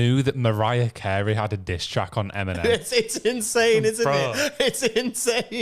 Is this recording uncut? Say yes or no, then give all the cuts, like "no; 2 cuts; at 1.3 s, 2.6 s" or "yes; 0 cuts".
yes; 0 cuts